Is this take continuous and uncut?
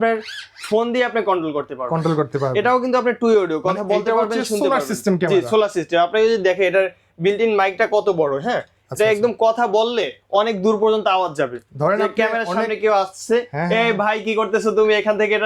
yes; 0 cuts

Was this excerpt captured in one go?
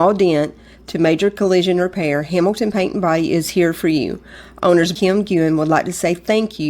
yes; 0 cuts

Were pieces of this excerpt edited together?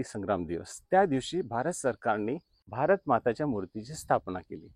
yes; 1 cut; at 2.6 s

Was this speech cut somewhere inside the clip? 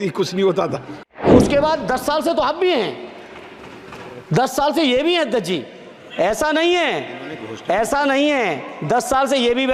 yes; 1 cut; at 1.3 s

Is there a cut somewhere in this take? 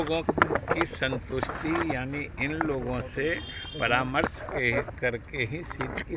no; 0 cuts

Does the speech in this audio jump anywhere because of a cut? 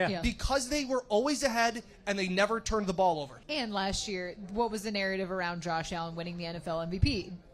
yes; 1 cut; at 3.4 s

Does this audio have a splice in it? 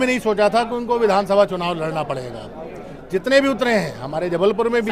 no; 0 cuts

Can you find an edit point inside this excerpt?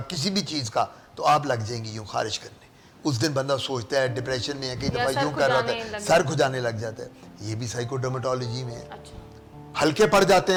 no; 0 cuts

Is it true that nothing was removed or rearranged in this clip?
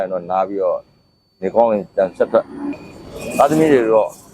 no; 1 cut; at 2.7 s

